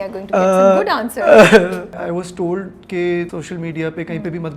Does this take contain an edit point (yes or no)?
yes